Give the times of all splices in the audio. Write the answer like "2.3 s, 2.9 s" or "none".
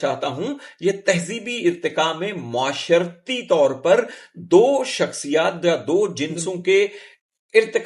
none